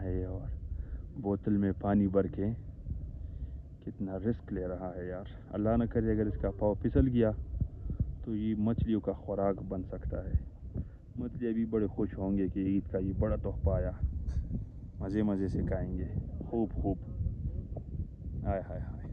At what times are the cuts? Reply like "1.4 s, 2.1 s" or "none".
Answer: none